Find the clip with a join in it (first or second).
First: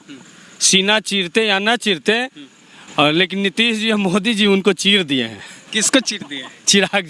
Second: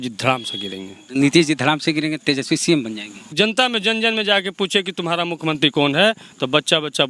second